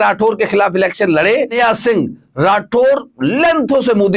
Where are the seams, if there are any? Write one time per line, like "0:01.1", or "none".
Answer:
0:01.6